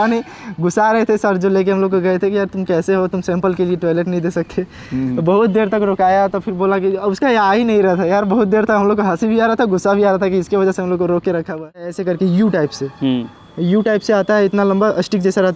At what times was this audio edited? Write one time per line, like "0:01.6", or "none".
0:11.9